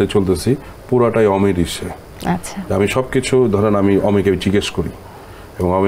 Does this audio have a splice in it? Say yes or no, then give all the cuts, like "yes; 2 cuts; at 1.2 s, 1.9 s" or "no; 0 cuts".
no; 0 cuts